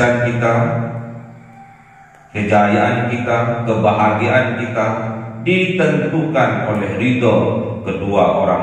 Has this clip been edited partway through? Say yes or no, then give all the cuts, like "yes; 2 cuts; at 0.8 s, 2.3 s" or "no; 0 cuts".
no; 0 cuts